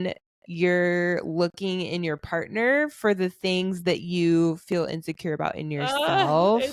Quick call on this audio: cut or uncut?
uncut